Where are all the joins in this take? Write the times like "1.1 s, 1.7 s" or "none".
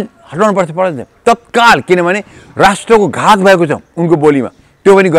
none